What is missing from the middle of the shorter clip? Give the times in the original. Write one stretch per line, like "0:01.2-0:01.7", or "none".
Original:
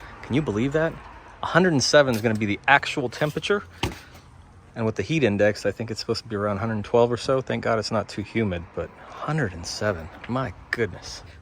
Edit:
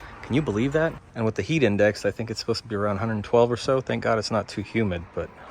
0:01.0-0:04.6